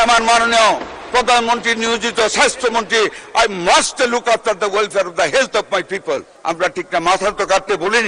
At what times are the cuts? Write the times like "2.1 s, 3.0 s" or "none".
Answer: 6.3 s